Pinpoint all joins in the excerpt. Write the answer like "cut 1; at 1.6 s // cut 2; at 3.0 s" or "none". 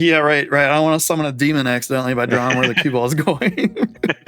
none

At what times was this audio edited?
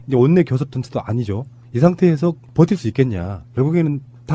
cut 1; at 1.3 s

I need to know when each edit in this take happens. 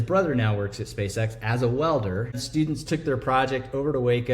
cut 1; at 2.4 s

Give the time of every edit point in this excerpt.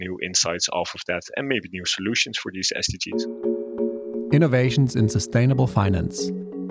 cut 1; at 3.1 s

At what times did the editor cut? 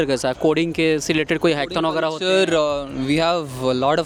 none

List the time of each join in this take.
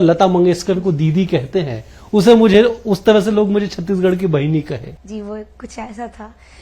none

